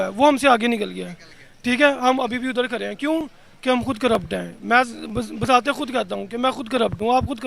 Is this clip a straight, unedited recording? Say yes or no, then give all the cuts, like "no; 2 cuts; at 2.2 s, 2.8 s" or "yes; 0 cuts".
yes; 0 cuts